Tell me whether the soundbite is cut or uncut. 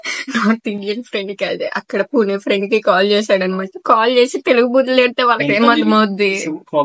uncut